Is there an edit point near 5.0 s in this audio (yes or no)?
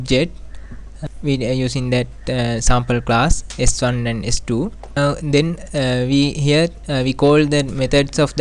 yes